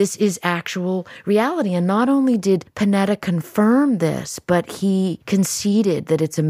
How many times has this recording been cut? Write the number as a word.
two